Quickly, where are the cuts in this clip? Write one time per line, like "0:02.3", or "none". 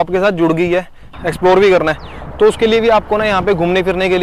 0:01.1